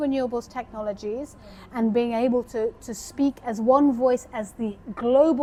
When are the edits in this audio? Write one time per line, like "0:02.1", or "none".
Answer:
none